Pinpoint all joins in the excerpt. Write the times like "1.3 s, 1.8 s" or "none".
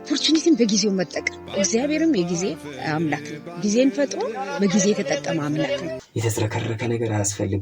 6.0 s